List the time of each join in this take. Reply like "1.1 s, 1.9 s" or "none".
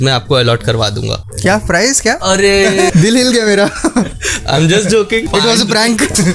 2.9 s, 5.3 s